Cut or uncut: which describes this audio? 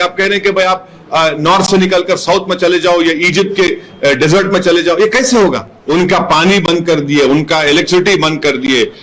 cut